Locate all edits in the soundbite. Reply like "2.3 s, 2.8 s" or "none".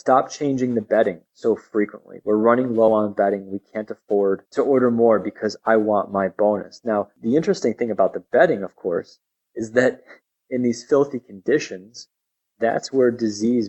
4.5 s, 7.1 s